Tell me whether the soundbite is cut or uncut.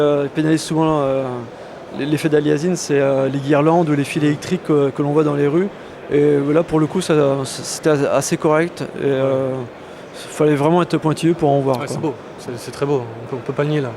cut